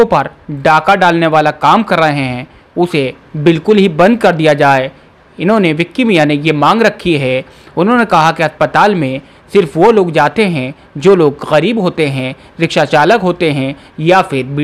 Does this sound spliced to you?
no; 0 cuts

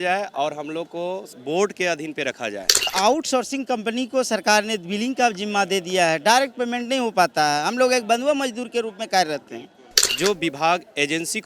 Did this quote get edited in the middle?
yes; 2 cuts; at 2.9 s, 10.0 s

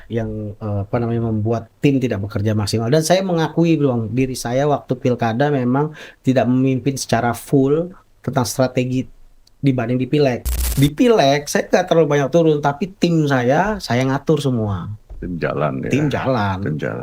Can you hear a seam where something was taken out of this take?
yes; 1 cut; at 10.5 s

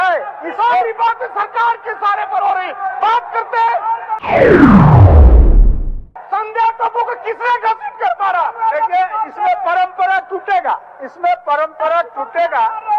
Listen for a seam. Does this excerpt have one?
yes; 3 cuts; at 4.2 s, 6.1 s, 10.6 s

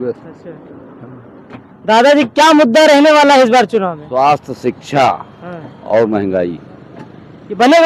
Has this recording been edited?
no; 0 cuts

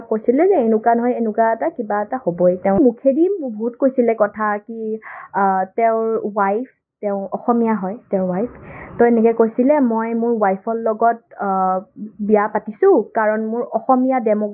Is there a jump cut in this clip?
yes; 1 cut; at 2.8 s

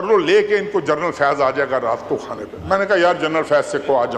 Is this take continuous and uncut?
yes; 0 cuts

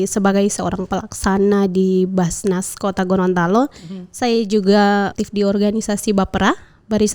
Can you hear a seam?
yes; 1 cut; at 5.1 s

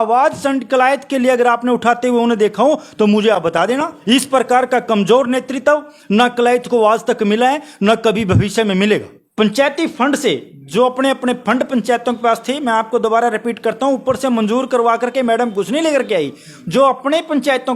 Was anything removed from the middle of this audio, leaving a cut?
yes; 2 cuts; at 3.9 s, 9.2 s

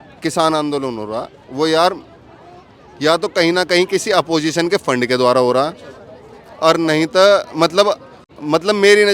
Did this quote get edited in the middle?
no; 0 cuts

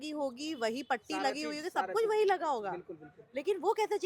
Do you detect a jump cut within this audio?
no; 0 cuts

